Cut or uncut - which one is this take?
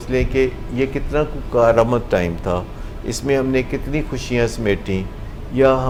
uncut